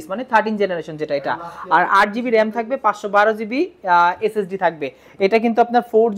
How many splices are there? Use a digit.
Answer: 0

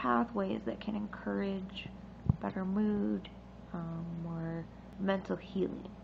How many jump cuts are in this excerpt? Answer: 1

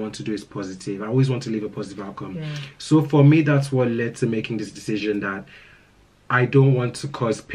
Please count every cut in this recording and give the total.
0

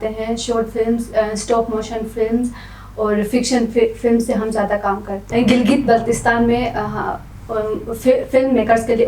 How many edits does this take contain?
1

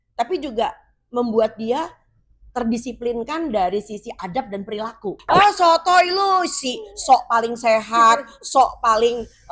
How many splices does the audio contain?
1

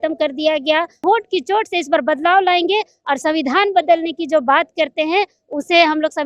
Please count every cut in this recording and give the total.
1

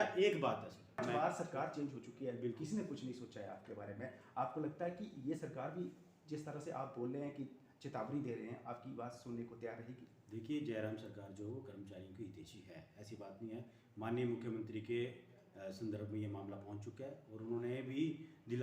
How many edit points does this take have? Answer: 1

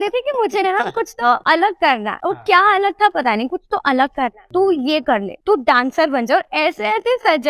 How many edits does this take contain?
0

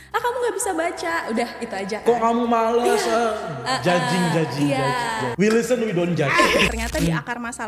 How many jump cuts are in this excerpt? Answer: 2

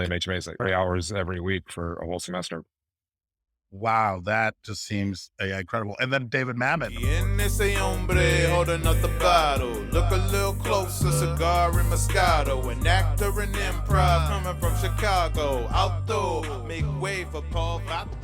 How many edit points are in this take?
1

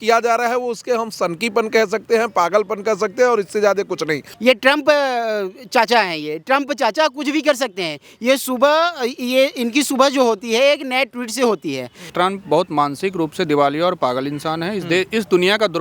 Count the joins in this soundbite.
2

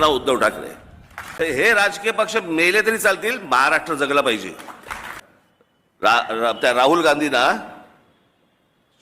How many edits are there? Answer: 2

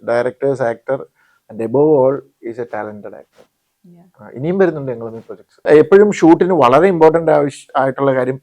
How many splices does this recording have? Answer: 1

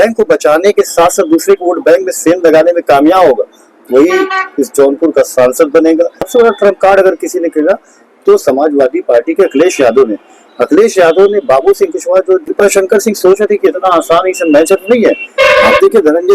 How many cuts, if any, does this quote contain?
2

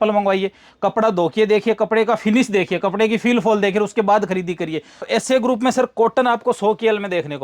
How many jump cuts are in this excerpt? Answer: 1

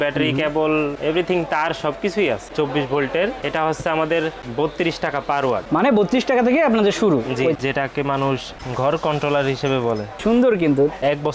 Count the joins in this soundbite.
2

